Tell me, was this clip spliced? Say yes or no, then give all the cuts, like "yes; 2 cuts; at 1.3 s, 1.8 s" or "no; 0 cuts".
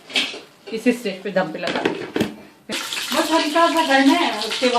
yes; 1 cut; at 2.8 s